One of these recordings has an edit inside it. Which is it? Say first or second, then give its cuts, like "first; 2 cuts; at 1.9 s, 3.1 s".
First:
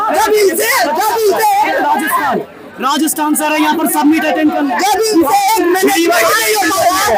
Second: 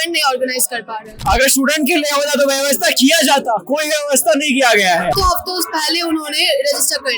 second; 2 cuts; at 1.1 s, 5.2 s